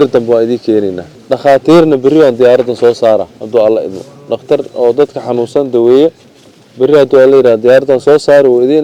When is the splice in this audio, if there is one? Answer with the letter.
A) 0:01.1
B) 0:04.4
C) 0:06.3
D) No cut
A